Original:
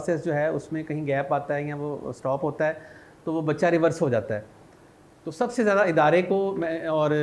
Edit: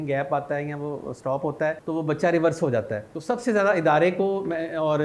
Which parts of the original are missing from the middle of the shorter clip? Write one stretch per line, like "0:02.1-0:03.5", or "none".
0:02.8-0:03.2
0:04.4-0:05.2